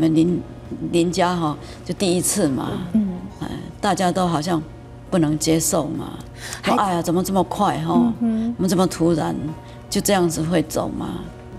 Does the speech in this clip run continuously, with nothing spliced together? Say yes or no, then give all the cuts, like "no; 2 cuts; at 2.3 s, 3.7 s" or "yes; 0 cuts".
yes; 0 cuts